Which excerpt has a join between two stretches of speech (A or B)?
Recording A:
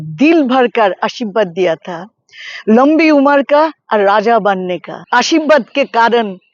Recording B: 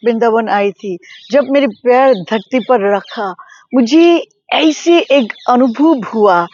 A